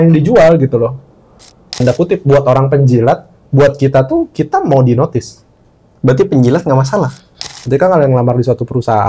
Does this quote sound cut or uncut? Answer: cut